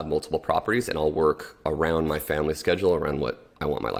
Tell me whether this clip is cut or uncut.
uncut